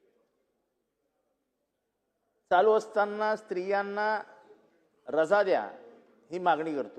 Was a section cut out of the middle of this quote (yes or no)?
no